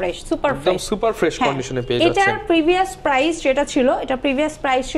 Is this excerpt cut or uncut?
uncut